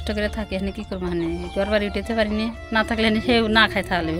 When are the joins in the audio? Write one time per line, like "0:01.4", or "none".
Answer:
0:02.6